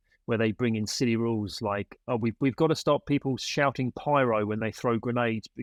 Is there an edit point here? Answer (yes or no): no